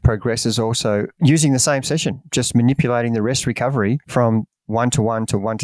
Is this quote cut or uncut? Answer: cut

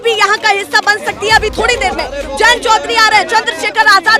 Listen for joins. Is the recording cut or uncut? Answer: uncut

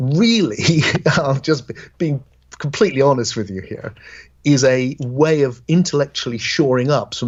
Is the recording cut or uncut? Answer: uncut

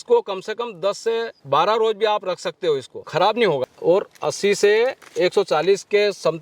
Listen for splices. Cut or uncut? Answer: cut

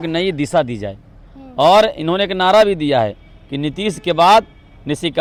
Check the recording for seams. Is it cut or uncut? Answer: uncut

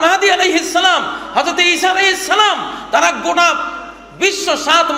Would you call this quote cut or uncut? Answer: uncut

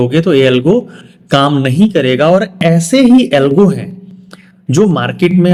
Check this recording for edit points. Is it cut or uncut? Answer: uncut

